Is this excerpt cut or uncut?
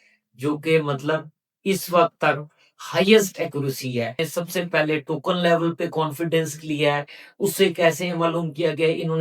cut